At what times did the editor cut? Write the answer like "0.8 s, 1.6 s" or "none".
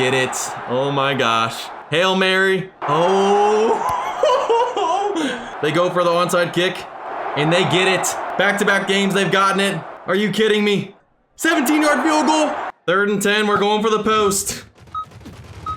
2.8 s, 5.5 s, 8.2 s, 9.9 s, 11.0 s, 12.7 s